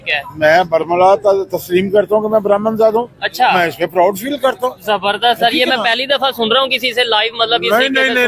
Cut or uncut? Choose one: uncut